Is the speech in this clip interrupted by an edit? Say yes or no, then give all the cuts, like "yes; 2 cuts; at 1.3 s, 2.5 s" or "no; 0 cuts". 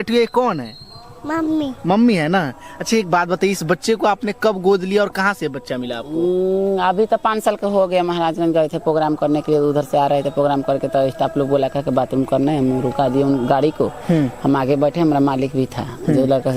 no; 0 cuts